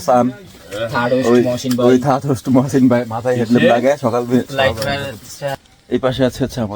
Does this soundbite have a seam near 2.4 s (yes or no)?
no